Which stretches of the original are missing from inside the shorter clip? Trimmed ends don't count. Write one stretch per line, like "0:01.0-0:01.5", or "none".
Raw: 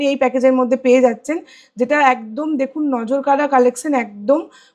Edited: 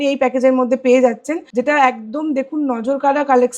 0:01.4-0:01.6

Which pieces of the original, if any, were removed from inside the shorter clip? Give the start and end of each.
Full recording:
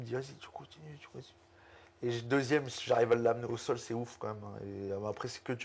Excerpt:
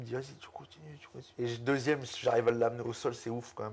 0:01.2-0:01.9

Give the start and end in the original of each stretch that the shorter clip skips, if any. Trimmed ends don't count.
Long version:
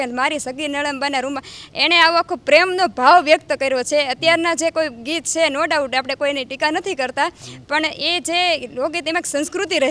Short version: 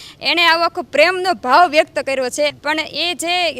0:04.1-0:07.6

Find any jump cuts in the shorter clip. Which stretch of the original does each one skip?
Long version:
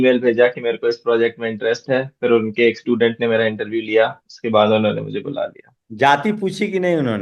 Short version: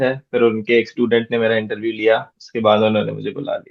none

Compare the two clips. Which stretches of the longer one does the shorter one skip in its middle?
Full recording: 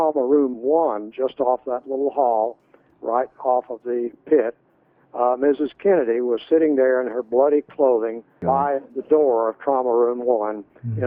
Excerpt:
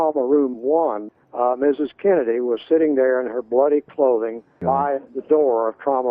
0:01.1-0:04.9

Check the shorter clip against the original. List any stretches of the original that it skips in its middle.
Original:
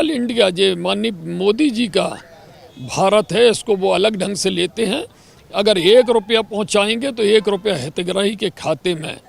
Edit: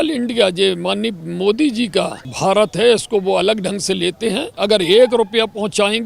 0:02.2-0:02.8
0:05.0-0:05.4

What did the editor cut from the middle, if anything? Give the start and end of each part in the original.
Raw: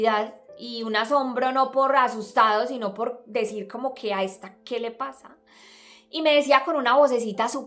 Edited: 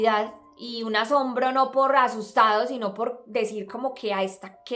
none

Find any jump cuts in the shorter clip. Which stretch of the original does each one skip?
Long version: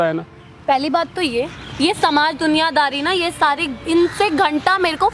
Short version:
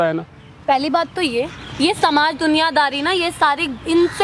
none

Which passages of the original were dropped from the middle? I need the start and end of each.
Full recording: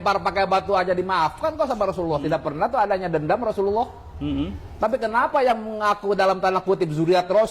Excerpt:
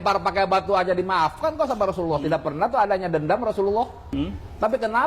0:04.0-0:04.2

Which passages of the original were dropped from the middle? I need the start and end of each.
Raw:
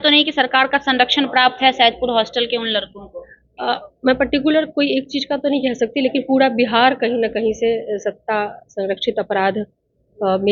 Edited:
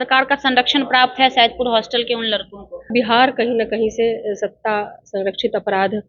0:03.3-0:06.5

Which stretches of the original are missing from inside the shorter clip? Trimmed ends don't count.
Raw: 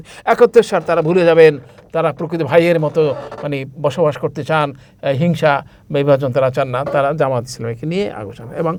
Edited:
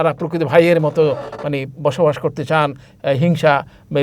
none

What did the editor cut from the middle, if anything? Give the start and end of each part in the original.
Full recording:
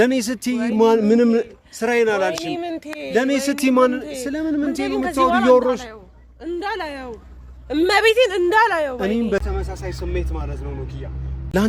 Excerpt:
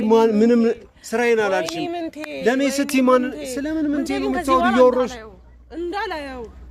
none

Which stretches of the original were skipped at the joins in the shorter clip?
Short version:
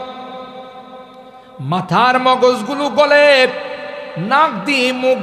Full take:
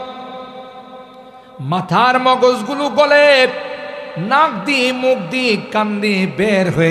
none

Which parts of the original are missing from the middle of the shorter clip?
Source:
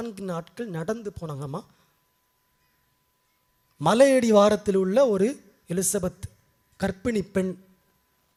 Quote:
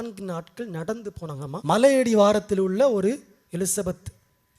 0:01.6-0:03.8

